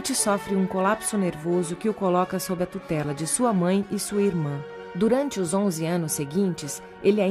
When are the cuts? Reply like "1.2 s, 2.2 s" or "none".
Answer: none